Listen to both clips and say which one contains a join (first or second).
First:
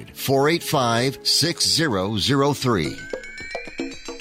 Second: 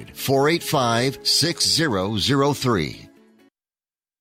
first